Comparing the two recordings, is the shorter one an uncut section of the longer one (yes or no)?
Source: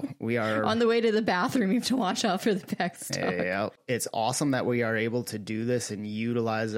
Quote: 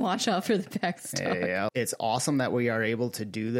no